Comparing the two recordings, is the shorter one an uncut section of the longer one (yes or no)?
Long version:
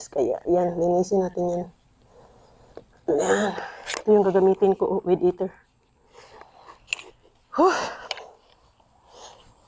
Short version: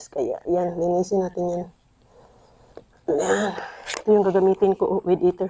yes